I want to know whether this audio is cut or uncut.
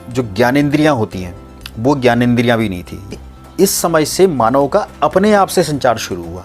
cut